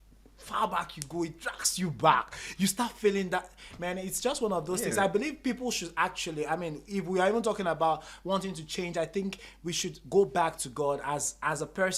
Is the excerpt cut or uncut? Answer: uncut